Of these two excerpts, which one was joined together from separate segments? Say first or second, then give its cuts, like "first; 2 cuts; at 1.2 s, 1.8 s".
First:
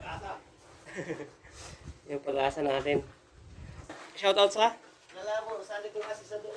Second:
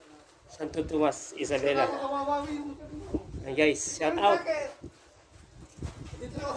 first; 1 cut; at 4.0 s